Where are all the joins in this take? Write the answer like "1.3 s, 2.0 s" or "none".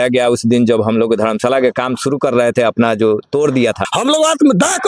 3.9 s